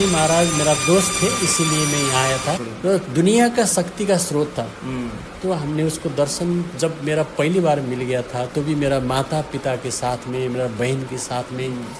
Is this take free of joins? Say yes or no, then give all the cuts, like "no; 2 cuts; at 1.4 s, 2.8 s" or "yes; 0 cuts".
no; 1 cut; at 2.7 s